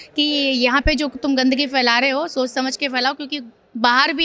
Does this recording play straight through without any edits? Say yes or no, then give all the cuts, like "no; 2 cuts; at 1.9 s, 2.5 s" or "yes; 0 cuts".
yes; 0 cuts